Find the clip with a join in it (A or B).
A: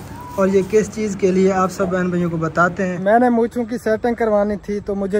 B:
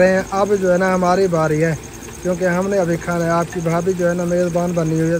A